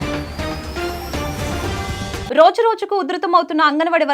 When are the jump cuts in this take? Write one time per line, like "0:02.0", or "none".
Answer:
0:02.3